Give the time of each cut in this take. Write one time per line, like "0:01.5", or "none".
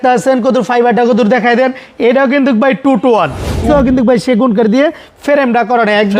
0:03.7